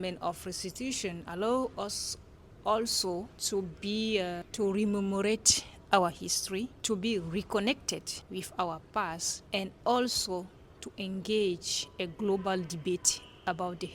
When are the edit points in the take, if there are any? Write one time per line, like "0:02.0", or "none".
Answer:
0:03.3
0:04.4
0:06.8
0:08.2
0:09.3